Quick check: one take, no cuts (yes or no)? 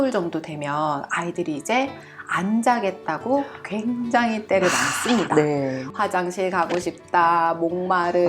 no